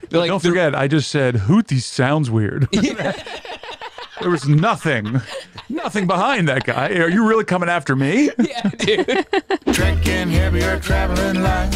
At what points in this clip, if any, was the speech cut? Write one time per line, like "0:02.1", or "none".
0:09.7

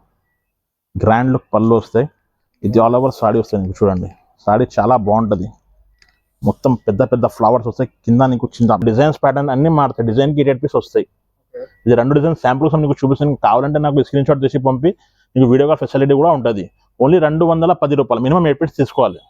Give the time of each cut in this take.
0:08.8

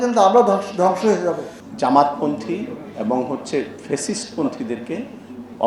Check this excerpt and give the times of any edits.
0:01.5

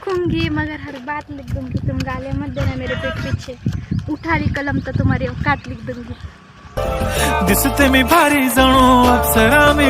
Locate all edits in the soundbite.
none

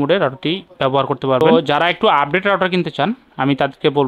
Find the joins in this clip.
0:01.4

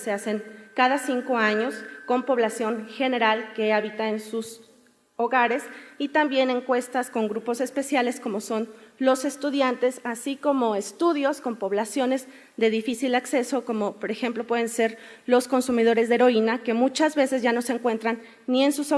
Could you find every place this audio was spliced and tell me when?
0:11.2

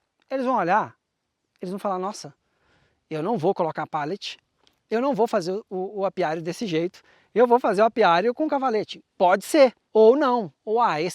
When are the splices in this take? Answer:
0:09.8

